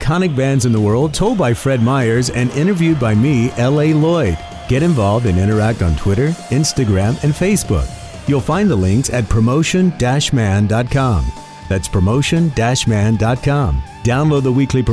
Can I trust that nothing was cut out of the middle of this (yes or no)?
yes